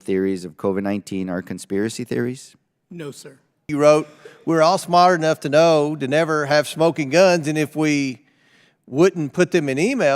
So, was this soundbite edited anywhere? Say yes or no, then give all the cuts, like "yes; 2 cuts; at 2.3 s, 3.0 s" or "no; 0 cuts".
yes; 1 cut; at 3.7 s